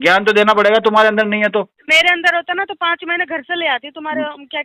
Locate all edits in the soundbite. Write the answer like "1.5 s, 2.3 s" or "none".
1.8 s